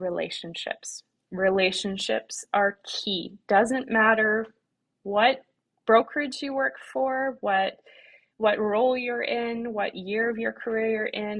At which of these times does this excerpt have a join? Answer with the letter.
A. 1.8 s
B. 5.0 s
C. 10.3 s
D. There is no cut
D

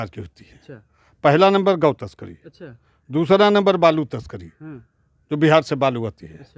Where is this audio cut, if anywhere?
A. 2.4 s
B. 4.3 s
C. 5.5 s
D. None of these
D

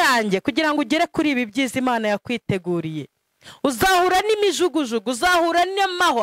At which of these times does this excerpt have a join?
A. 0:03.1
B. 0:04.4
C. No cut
C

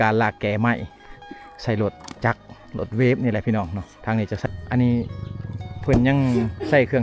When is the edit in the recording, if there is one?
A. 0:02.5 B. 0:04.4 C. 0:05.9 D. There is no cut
B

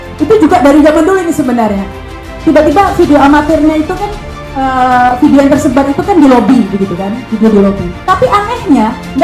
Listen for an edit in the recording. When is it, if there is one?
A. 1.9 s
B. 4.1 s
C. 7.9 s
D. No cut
C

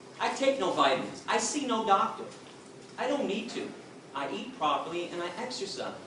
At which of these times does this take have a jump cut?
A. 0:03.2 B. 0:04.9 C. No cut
B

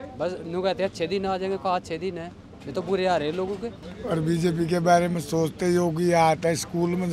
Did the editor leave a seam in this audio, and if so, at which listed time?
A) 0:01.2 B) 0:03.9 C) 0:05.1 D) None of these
B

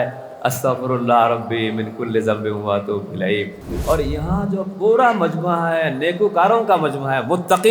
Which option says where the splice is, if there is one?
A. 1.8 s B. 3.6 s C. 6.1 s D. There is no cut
B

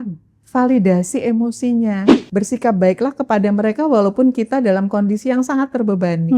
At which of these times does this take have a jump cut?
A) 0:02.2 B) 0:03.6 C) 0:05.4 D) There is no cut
A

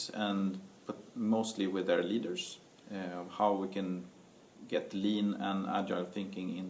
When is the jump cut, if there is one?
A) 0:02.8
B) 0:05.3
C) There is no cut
B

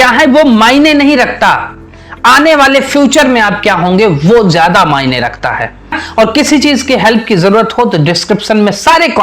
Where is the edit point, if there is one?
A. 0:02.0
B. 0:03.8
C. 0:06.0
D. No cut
C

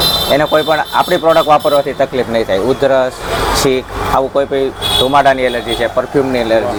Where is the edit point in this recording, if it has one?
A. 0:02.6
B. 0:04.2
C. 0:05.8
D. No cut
D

